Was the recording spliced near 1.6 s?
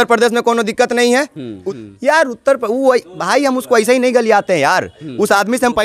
yes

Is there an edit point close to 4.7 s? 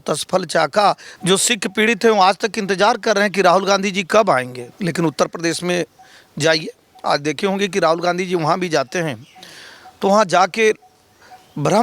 yes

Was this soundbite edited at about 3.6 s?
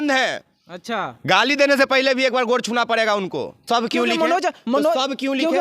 yes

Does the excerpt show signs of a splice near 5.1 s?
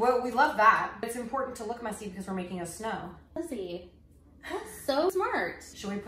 yes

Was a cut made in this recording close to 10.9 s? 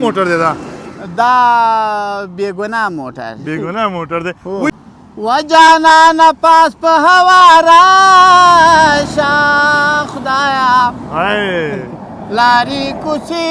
no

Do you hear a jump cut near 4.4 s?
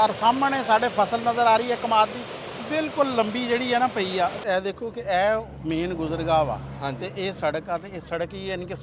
yes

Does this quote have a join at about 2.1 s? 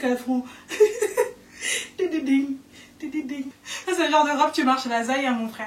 no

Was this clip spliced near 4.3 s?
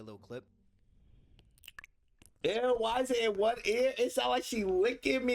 no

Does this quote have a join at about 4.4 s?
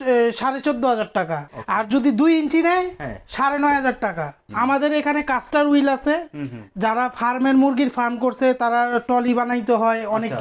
yes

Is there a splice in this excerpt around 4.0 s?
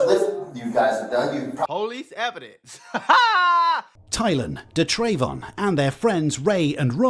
yes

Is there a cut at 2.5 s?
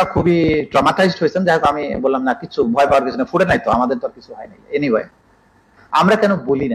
no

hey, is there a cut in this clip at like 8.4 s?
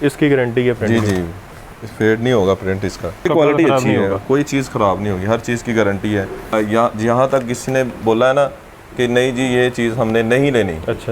no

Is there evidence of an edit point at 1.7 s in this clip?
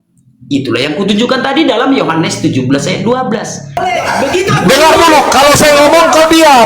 no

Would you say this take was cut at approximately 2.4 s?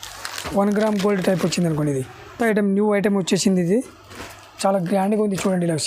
yes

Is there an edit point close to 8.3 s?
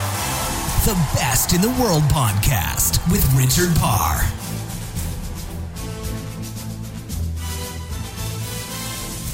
yes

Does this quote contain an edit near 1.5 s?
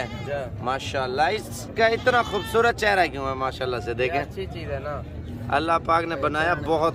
no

